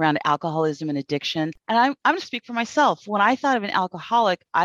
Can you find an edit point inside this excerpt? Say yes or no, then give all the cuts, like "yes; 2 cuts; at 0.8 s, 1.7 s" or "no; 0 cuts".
yes; 1 cut; at 1.6 s